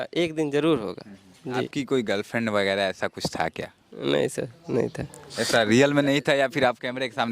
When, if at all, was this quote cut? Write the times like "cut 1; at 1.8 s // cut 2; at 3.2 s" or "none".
cut 1; at 1.7 s